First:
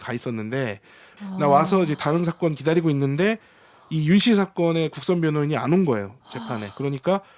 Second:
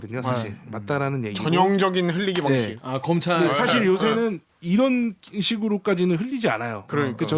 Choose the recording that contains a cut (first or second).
first